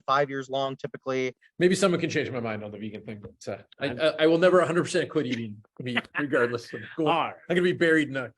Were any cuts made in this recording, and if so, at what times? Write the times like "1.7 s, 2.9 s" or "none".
1.4 s